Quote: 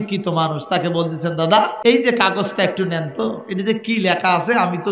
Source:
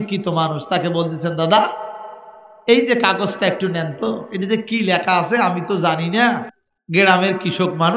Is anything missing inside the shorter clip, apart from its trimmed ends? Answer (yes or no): yes